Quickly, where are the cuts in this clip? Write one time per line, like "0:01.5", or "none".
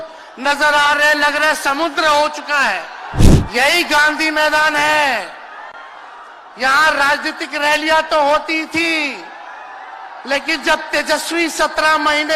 0:03.2

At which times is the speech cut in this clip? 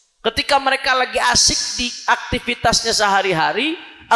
none

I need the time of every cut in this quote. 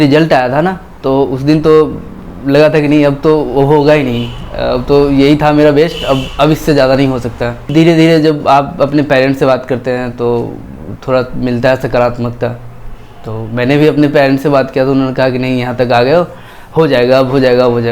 0:07.6

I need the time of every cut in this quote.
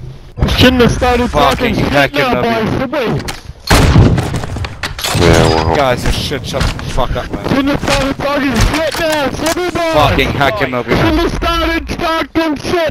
none

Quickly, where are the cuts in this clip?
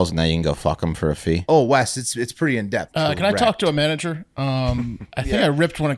0:01.4
0:02.9
0:05.0

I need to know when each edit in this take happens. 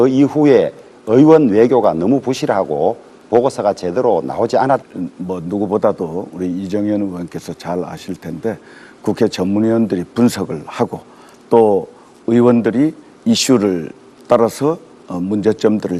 none

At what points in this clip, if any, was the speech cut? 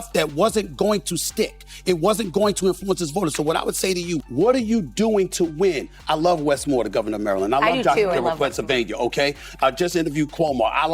0:04.2

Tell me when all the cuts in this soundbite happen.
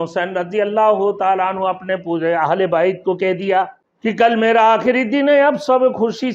0:03.8

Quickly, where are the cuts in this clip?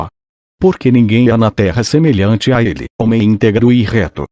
none

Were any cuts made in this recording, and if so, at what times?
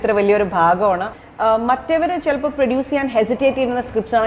0:01.1

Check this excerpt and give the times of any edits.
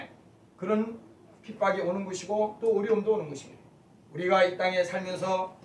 0:01.0

